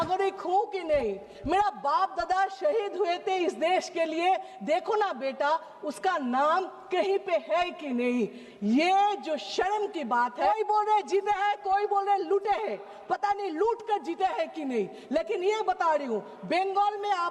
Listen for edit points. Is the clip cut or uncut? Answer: cut